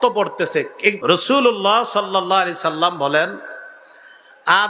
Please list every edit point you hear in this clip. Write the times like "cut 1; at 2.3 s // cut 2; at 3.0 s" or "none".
cut 1; at 1.0 s